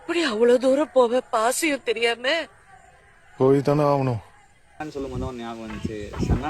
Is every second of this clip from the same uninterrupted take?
no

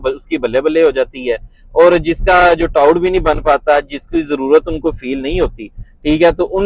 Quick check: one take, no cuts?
yes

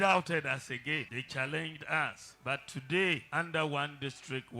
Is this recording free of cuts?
no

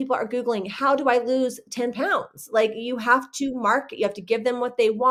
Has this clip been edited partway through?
no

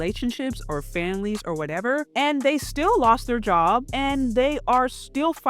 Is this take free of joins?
no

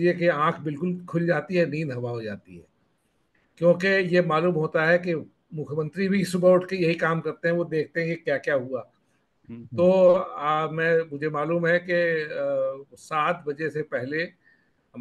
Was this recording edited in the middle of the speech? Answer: no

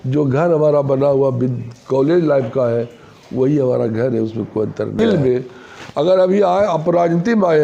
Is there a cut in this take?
yes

